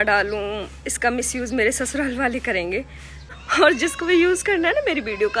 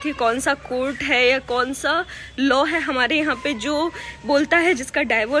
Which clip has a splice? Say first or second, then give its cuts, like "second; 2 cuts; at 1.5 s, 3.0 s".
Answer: first; 1 cut; at 3.3 s